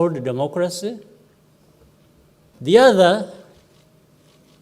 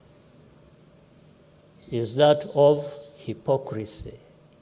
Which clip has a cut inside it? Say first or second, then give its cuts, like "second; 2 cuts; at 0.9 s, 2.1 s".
first; 1 cut; at 2.6 s